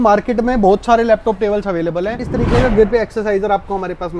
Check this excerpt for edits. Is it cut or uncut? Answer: cut